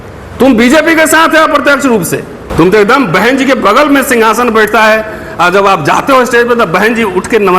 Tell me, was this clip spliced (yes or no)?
yes